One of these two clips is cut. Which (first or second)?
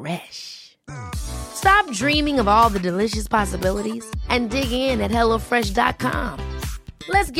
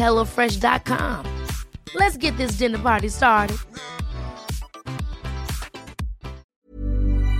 second